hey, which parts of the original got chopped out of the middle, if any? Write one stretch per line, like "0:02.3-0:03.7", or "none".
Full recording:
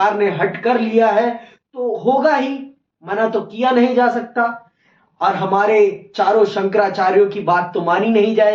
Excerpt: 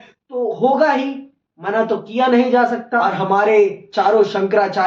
0:04.5-0:05.2